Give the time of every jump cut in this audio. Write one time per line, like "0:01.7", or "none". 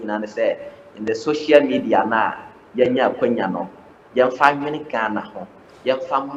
none